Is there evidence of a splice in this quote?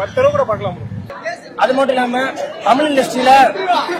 yes; 1 cut; at 1.1 s

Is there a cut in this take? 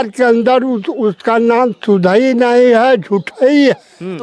no; 0 cuts

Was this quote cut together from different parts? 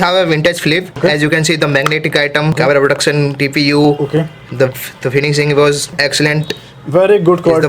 yes; 3 cuts; at 0.9 s, 2.5 s, 6.0 s

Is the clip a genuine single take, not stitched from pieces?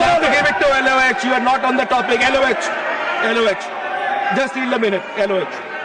yes; 0 cuts

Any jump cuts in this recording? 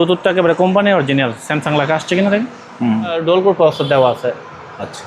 yes; 1 cut; at 3.2 s

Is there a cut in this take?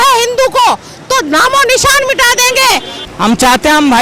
yes; 1 cut; at 3.0 s

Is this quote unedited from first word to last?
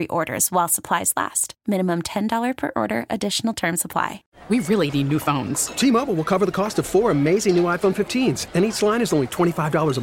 no; 1 cut; at 4.3 s

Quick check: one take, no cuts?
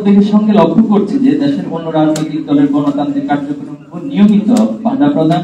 yes; 0 cuts

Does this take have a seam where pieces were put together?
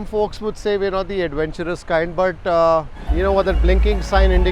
yes; 1 cut; at 3.1 s

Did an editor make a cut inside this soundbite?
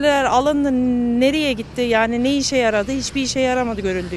no; 0 cuts

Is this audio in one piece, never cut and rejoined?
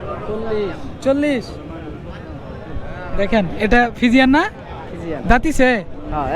yes; 0 cuts

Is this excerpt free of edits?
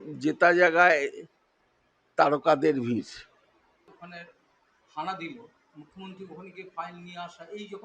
no; 1 cut; at 3.9 s

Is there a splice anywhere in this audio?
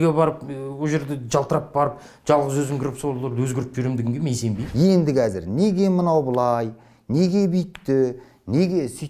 yes; 1 cut; at 4.6 s

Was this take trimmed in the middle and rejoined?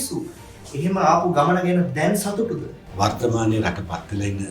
yes; 1 cut; at 2.8 s

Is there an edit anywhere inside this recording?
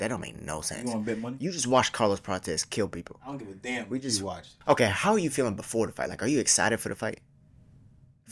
yes; 1 cut; at 4.5 s

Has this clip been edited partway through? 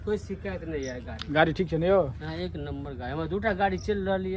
no; 0 cuts

